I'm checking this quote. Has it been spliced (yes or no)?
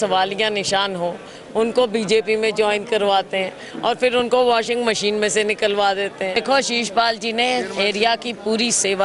yes